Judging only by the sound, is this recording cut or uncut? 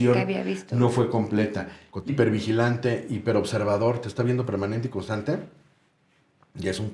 cut